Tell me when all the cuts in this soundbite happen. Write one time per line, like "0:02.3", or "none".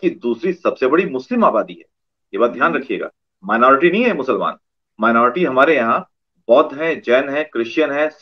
none